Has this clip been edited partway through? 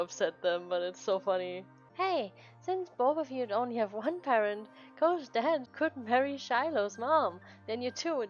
yes; 2 cuts; at 1.8 s, 5.7 s

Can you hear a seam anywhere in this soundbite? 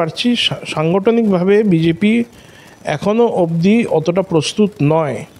no; 0 cuts

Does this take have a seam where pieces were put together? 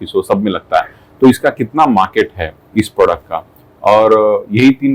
no; 0 cuts

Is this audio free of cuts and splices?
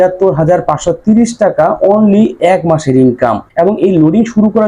no; 1 cut; at 3.4 s

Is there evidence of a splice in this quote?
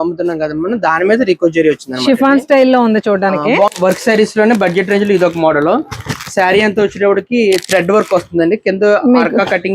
yes; 1 cut; at 3.7 s

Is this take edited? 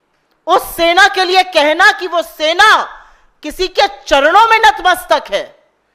no; 0 cuts

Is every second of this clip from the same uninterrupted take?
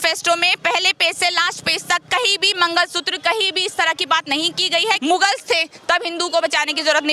no; 1 cut; at 5.0 s

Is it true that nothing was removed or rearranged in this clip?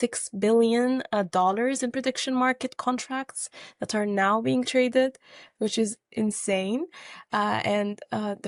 yes; 0 cuts

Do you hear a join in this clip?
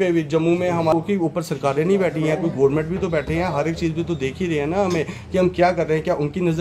yes; 1 cut; at 0.9 s

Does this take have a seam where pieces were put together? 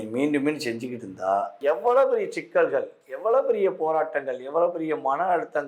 yes; 1 cut; at 1.6 s

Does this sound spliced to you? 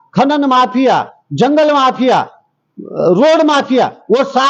no; 0 cuts

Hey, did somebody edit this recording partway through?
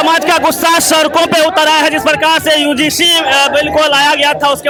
no; 0 cuts

